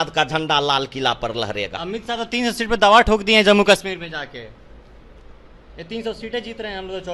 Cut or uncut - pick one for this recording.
uncut